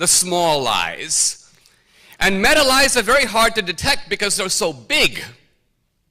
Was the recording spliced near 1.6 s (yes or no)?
no